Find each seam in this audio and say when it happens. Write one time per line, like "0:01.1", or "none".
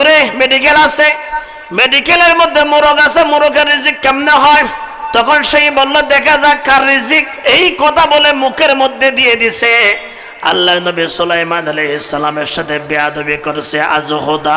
0:07.3